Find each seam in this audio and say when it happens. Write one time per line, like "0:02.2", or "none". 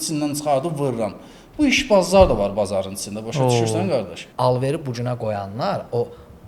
0:04.2